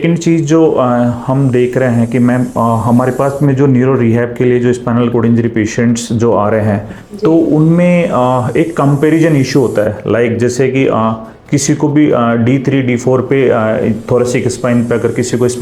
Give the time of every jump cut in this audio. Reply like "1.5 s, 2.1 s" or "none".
none

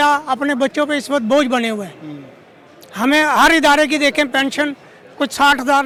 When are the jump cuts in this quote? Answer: none

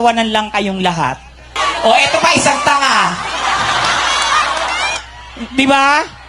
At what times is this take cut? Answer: 1.5 s

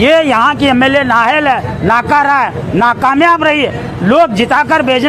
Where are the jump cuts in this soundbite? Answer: none

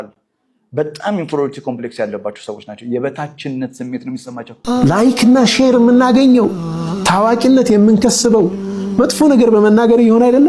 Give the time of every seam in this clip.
4.5 s

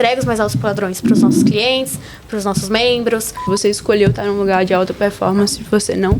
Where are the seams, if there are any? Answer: 3.4 s

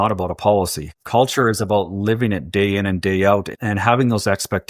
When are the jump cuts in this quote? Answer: 1.2 s, 3.5 s

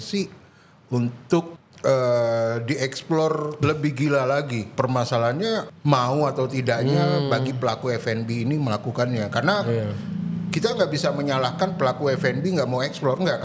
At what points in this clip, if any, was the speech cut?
1.6 s, 3.6 s, 4.7 s, 5.7 s

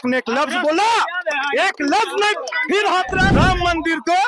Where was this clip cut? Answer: 3.3 s

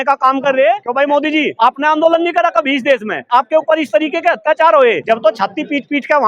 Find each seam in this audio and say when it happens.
1.3 s, 3.2 s, 5.0 s

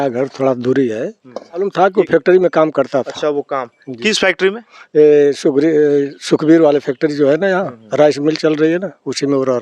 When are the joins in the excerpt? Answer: 1.7 s

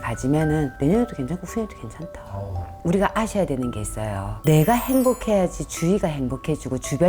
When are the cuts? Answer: 2.8 s

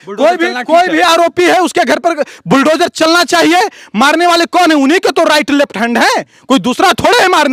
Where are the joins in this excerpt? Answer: none

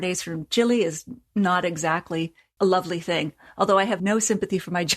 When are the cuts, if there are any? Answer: 2.4 s, 4.0 s

